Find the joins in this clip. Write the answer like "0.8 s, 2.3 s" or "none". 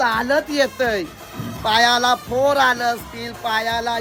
none